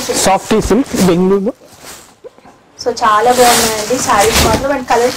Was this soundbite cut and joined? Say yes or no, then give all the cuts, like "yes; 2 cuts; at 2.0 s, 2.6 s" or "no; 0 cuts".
no; 0 cuts